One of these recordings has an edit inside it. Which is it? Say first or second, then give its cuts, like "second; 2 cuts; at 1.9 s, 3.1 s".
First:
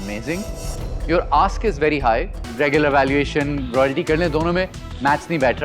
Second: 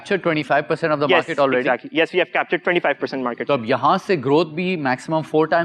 first; 1 cut; at 2.4 s